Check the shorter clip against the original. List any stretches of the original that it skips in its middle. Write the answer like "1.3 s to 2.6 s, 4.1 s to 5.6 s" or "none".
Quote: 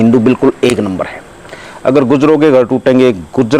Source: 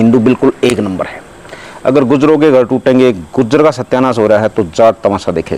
none